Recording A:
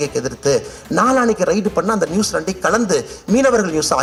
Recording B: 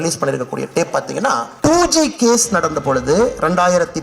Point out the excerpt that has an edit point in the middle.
B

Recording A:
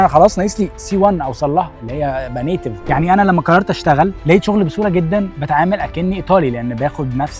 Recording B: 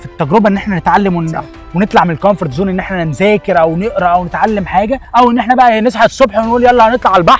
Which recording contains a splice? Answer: A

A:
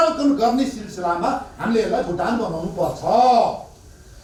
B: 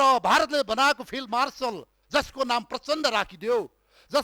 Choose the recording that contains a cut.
B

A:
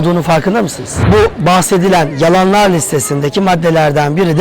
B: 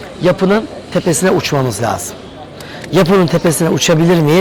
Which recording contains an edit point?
A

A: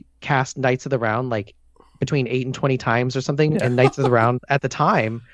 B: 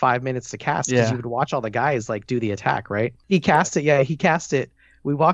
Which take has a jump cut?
B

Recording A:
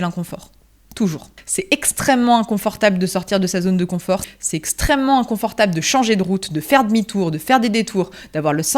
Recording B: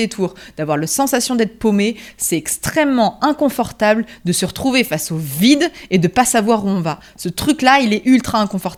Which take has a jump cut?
A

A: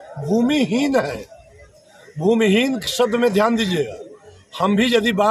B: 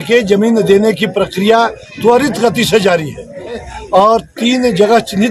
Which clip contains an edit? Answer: B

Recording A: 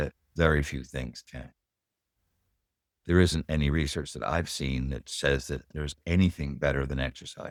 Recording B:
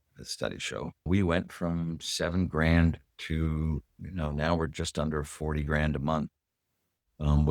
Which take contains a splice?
B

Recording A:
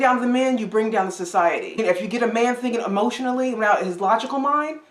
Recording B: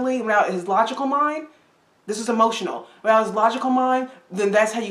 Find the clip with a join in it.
A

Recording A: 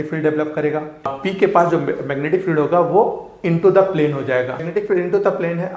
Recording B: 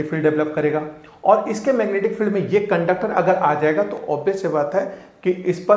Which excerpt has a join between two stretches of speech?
A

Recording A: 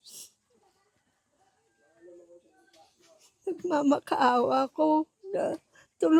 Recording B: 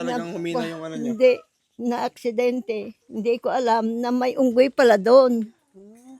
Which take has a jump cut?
B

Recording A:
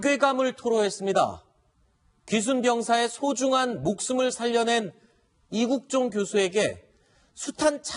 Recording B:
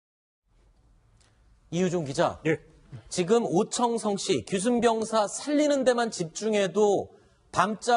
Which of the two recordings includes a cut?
B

